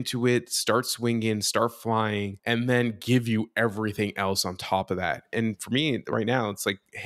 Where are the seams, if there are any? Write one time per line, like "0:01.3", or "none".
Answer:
0:02.4
0:05.2